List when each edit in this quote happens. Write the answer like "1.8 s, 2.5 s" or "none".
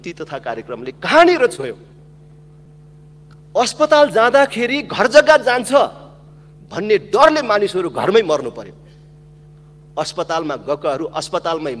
2.7 s